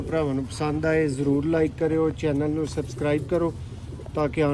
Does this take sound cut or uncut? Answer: uncut